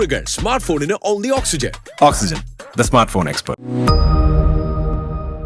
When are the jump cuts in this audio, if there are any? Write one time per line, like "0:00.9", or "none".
none